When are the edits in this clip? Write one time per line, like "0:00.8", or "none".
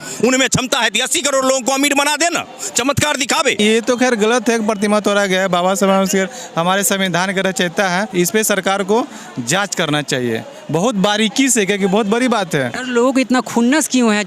0:03.6
0:08.1
0:12.8